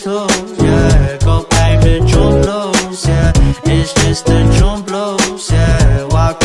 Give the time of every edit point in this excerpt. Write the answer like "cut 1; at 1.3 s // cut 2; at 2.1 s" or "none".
cut 1; at 1.5 s